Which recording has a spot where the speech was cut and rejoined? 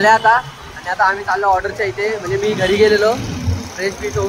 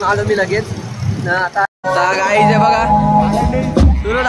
second; 1 cut; at 1.6 s

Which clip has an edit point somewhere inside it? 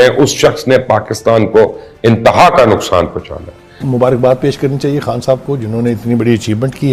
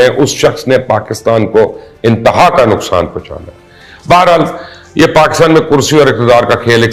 first; 1 cut; at 3.8 s

